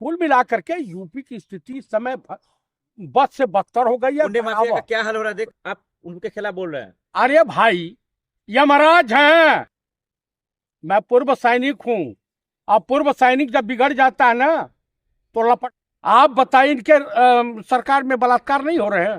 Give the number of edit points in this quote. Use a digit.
2